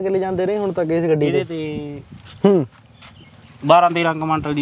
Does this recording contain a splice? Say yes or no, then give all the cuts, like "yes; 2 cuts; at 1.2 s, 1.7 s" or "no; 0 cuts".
no; 0 cuts